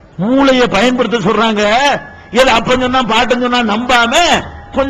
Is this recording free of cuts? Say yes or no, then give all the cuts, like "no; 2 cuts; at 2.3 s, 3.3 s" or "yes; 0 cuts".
yes; 0 cuts